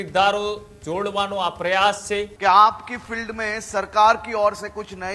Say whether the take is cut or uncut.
cut